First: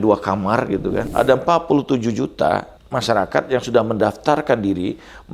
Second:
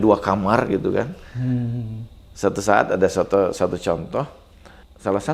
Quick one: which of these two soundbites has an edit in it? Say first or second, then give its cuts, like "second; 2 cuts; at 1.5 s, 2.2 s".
first; 2 cuts; at 1.1 s, 2.8 s